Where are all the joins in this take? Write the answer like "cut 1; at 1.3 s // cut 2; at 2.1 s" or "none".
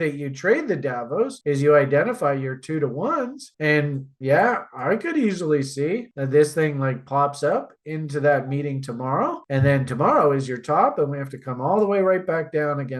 none